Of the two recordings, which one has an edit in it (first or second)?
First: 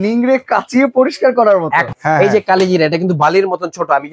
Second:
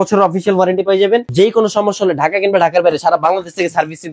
first